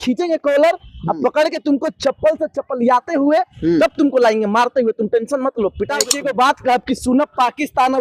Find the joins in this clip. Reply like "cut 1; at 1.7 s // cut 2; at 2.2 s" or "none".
cut 1; at 6.1 s